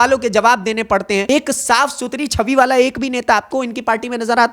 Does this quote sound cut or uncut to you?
cut